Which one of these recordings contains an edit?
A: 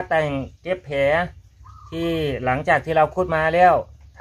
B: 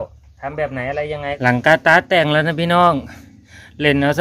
B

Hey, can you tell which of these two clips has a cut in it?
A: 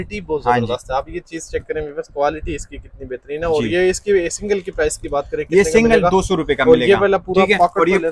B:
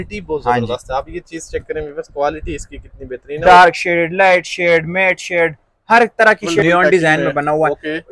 B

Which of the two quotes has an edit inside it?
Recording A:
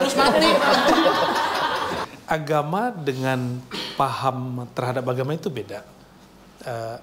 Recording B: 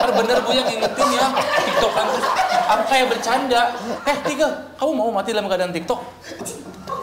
A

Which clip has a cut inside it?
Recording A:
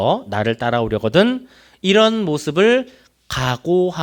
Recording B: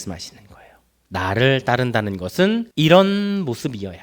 B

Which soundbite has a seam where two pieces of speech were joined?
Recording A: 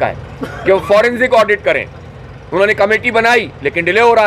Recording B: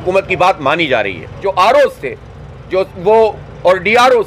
B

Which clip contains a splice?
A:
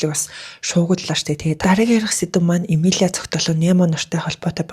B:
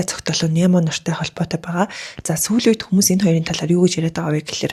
A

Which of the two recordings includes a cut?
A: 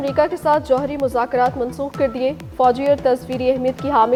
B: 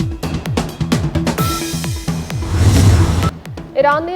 B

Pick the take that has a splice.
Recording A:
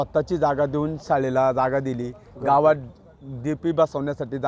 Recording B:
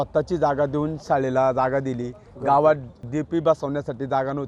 B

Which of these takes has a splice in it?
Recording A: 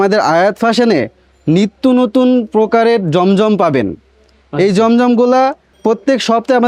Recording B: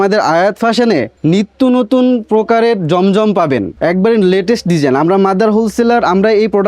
B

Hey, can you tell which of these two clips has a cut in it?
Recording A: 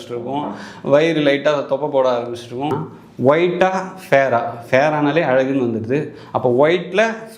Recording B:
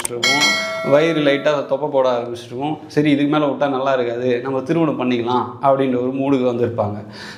A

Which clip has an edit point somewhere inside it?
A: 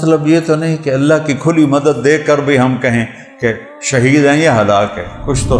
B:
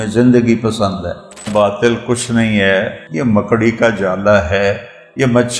B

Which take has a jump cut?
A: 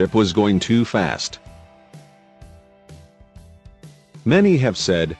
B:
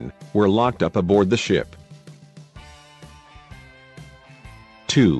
A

